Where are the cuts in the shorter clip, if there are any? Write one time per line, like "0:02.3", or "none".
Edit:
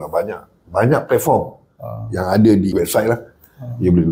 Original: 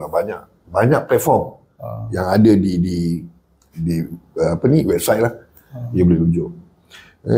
0:02.7